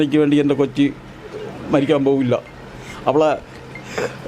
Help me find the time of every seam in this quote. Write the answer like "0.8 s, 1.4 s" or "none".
none